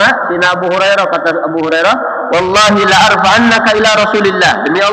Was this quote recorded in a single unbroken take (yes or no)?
yes